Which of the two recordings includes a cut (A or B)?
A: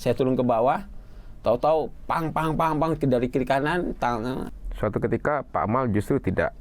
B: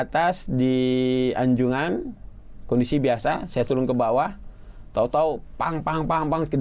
A